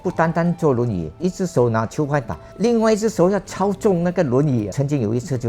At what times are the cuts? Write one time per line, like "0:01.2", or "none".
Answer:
0:01.2
0:02.4
0:04.7